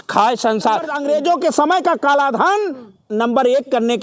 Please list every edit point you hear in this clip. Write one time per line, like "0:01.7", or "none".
0:00.9

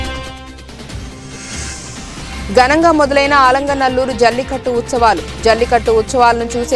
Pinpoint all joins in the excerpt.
0:02.1

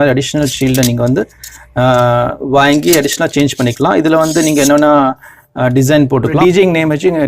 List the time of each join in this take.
0:06.4

